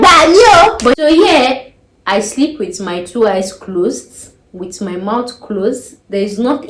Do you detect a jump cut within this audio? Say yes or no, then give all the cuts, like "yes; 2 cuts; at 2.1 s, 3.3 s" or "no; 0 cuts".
yes; 1 cut; at 0.9 s